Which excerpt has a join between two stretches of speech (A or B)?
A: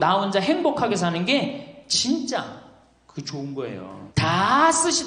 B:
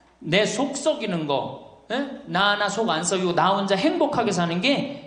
A